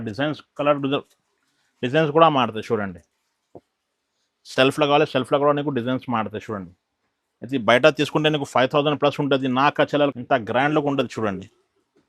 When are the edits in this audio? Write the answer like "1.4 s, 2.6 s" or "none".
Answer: 10.1 s